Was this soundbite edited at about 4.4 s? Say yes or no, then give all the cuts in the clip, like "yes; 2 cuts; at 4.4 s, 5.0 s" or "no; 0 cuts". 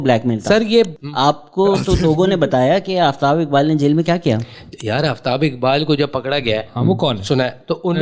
no; 1 cut; at 0.9 s